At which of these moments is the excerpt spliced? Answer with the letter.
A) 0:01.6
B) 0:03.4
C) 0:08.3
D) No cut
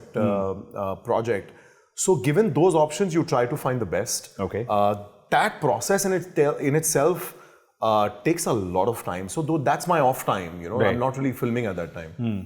D